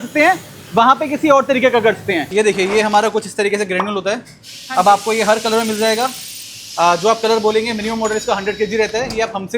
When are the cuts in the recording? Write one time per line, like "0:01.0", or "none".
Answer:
0:02.3